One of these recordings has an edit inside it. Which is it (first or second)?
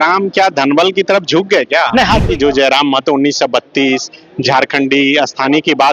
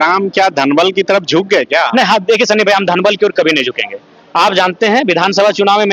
first